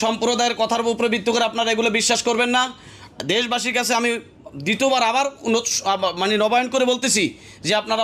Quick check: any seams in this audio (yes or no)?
no